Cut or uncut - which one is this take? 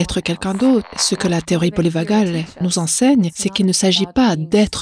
cut